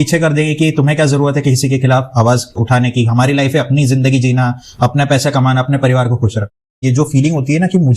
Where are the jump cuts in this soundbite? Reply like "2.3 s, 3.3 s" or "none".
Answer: 6.7 s